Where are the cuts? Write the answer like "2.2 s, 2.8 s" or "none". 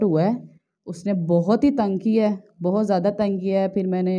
none